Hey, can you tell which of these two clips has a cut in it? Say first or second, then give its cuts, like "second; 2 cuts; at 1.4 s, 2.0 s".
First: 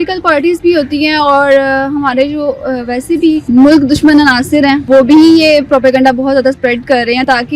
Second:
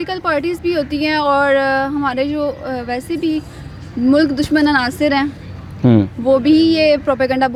first; 2 cuts; at 3.4 s, 4.8 s